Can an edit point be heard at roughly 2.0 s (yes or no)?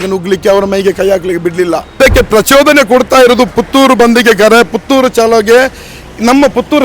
yes